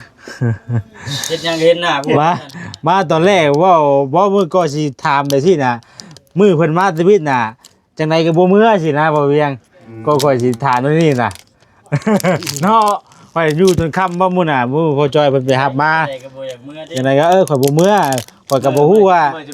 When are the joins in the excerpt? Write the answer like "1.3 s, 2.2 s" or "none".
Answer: none